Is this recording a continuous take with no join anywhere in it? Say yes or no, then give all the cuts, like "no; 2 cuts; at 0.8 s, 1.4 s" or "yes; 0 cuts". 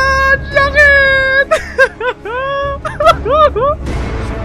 no; 1 cut; at 2.8 s